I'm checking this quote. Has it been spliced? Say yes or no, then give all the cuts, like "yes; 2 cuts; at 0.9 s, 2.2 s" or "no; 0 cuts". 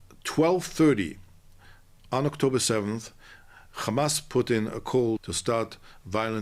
yes; 1 cut; at 5.3 s